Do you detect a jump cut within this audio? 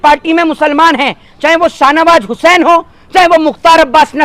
no; 0 cuts

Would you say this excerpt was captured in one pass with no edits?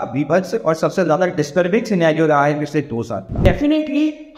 no; 1 cut; at 3.2 s

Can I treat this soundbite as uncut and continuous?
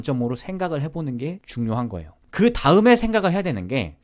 no; 1 cut; at 1.4 s

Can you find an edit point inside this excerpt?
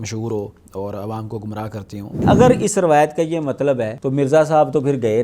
yes; 2 cuts; at 2.2 s, 4.0 s

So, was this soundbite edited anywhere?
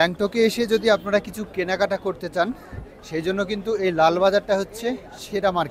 no; 0 cuts

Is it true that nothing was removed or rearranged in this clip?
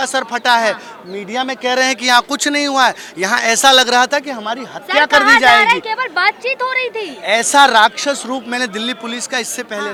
yes; 0 cuts

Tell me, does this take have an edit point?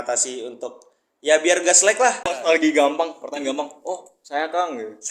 yes; 1 cut; at 2.3 s

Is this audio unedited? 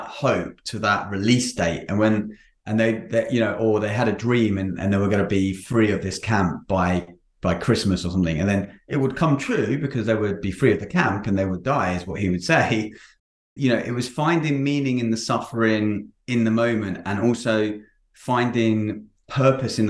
no; 1 cut; at 13.1 s

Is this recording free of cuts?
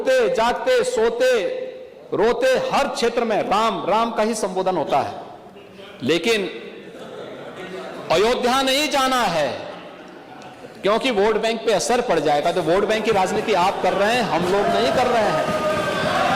yes; 0 cuts

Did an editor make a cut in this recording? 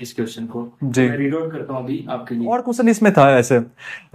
yes; 1 cut; at 2.7 s

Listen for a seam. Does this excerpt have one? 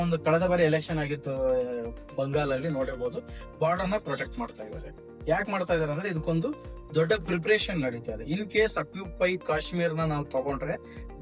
no; 0 cuts

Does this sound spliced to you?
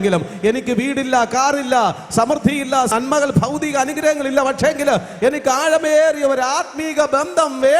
no; 0 cuts

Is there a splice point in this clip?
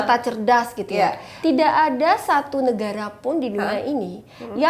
yes; 1 cut; at 1.3 s

